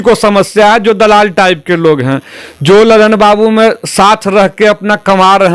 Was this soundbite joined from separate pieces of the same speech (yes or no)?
no